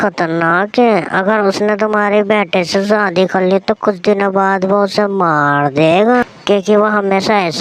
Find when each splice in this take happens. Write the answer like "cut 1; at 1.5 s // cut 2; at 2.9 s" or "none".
none